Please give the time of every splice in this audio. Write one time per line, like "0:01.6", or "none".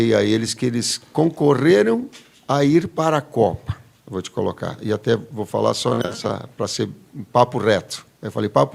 none